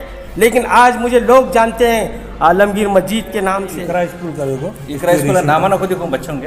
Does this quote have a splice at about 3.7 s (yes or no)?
yes